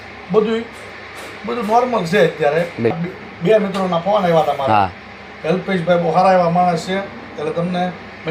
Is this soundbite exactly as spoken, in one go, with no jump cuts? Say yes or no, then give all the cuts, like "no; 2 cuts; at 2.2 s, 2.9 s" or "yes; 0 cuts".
no; 1 cut; at 2.9 s